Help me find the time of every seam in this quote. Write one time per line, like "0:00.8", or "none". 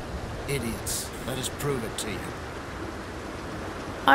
none